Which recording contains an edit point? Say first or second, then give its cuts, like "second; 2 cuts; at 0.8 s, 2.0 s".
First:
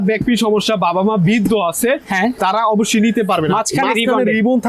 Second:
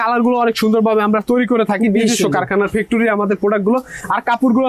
first; 2 cuts; at 2.4 s, 3.5 s